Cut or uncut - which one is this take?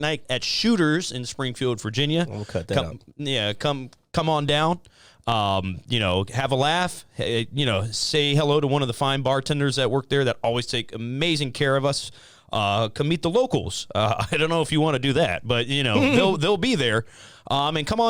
uncut